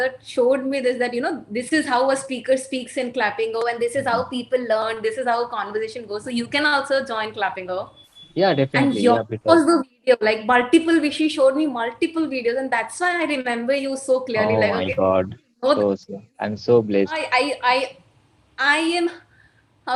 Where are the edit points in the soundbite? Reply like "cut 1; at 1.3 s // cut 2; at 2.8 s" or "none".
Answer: cut 1; at 17.2 s